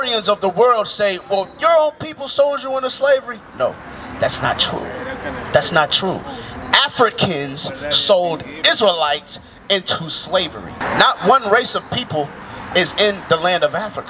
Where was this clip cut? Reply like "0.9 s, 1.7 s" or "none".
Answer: 10.8 s